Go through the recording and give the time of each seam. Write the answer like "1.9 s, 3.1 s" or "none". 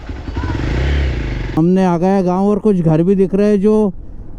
1.6 s